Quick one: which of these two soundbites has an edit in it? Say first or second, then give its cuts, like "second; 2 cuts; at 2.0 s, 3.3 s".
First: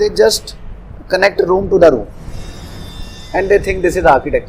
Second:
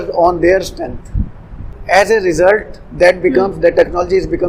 second; 1 cut; at 1.7 s